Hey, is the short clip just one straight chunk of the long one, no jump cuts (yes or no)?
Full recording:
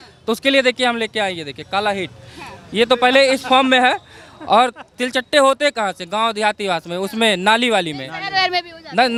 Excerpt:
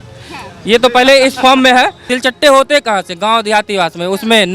no